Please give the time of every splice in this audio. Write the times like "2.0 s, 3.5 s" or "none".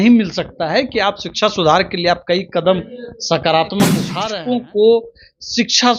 4.1 s